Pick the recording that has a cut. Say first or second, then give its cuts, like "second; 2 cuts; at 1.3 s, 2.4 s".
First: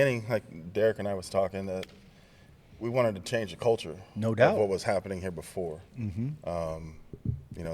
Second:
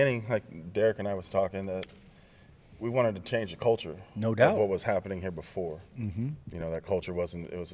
second; 1 cut; at 6.4 s